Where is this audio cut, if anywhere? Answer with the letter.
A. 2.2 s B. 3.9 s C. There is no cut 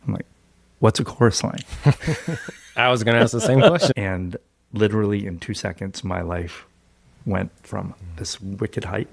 B